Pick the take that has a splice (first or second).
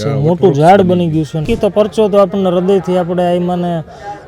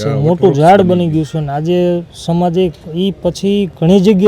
first